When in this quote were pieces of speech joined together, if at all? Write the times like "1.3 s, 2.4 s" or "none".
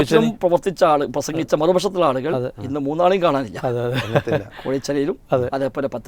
none